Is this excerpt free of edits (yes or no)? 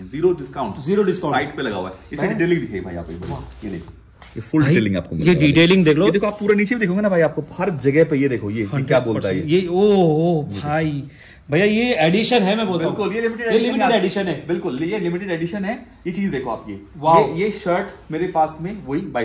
yes